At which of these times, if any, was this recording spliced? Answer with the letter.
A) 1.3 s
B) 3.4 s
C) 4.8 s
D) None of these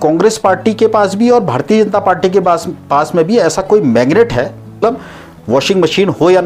C